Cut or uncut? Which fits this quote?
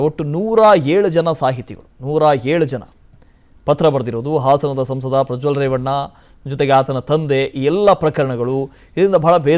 uncut